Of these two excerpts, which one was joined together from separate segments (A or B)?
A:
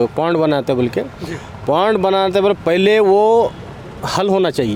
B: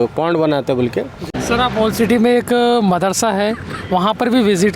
B